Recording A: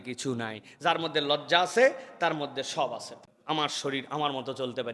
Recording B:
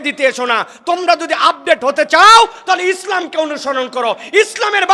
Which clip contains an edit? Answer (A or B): A